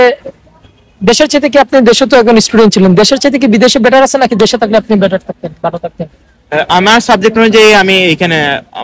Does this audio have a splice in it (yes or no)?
no